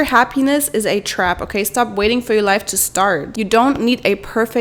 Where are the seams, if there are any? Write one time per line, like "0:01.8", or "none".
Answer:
none